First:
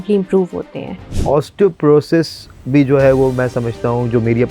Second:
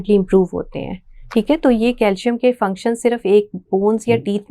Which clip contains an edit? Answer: first; 1 cut; at 1.2 s

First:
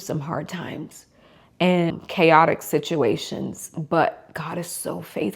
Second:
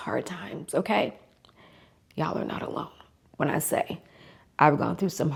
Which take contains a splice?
first; 1 cut; at 1.9 s

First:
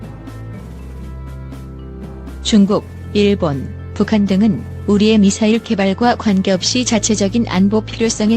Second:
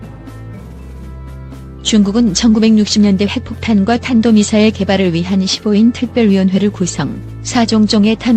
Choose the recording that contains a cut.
first; 1 cut; at 1.9 s

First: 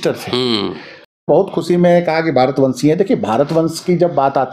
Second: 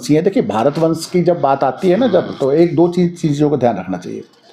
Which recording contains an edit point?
first; 1 cut; at 1.3 s

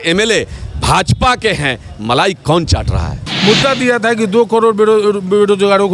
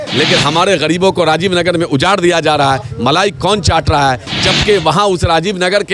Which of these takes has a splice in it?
first; 1 cut; at 3.3 s

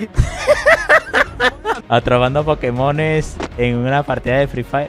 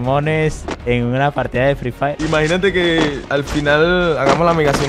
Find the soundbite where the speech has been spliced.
first; 1 cut; at 1.8 s

